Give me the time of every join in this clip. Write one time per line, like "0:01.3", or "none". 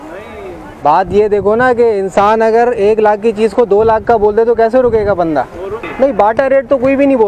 0:05.8